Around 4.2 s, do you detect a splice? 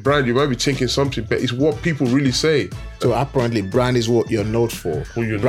no; 1 cut; at 2.8 s

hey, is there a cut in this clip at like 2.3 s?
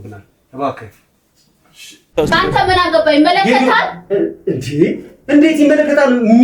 yes; 1 cut; at 2.3 s

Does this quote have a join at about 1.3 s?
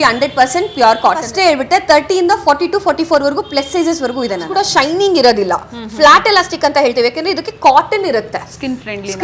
yes; 2 cuts; at 1.3 s, 4.5 s

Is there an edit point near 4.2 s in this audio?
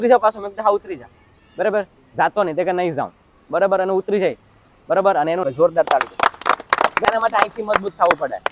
no; 2 cuts; at 5.4 s, 7.0 s

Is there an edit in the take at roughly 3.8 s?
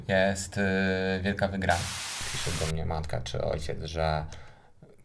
no; 1 cut; at 2.3 s

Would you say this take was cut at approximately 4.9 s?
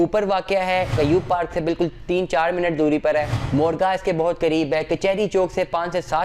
no; 2 cuts; at 0.9 s, 3.4 s

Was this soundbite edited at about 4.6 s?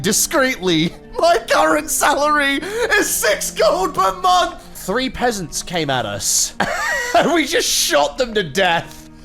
yes; 1 cut; at 4.6 s

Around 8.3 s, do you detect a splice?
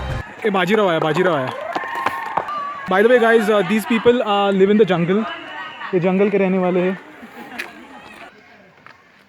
yes; 2 cuts; at 2.5 s, 8.3 s

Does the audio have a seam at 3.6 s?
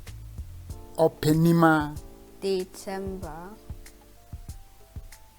yes; 2 cuts; at 1.0 s, 3.6 s

